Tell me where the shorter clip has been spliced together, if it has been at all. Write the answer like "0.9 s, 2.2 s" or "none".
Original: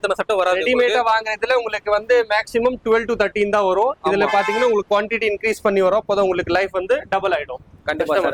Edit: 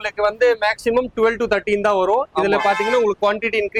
none